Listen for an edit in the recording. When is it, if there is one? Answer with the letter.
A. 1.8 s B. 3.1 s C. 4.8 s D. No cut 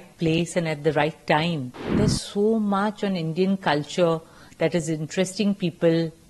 A